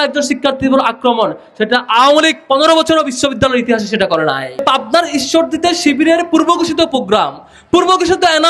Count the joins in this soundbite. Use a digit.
1